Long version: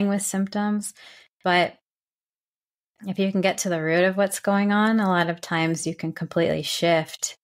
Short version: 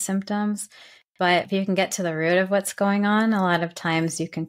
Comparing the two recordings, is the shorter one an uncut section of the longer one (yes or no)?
no